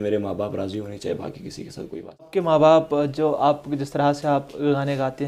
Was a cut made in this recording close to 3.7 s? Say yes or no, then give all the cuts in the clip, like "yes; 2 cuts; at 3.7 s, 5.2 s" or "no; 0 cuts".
no; 1 cut; at 2.3 s